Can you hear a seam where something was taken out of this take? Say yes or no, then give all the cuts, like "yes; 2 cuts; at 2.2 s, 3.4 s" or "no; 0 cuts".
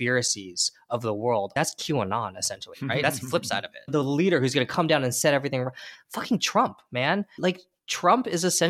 yes; 2 cuts; at 3.9 s, 7.3 s